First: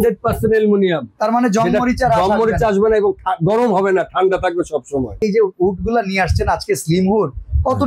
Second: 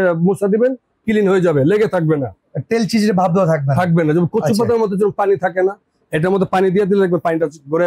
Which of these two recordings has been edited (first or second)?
first